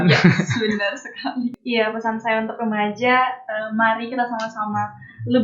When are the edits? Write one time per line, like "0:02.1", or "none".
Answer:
0:01.6